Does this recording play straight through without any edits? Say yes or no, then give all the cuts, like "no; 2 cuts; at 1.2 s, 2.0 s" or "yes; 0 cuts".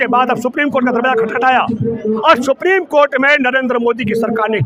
yes; 0 cuts